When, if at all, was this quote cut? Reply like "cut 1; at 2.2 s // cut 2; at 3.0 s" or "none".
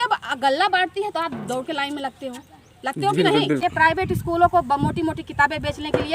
cut 1; at 3.6 s

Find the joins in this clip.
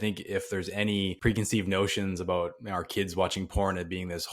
cut 1; at 1.2 s

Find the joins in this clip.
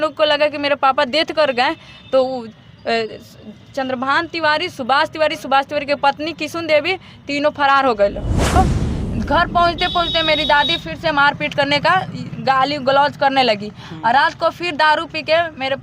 cut 1; at 8.6 s

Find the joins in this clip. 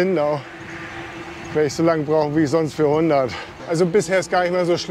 cut 1; at 3.6 s

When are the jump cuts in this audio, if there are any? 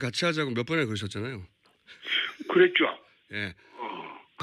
cut 1; at 3.5 s

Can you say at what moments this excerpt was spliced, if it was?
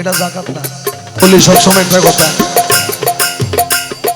cut 1; at 1.2 s

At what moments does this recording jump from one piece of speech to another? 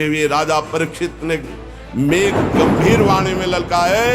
none

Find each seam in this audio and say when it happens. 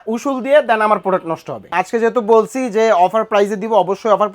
cut 1; at 1.7 s

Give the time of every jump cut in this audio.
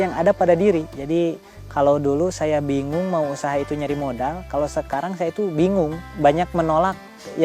cut 1; at 0.9 s

